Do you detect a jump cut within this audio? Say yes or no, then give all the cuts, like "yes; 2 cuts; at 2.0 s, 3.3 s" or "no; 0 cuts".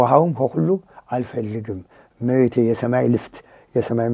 no; 0 cuts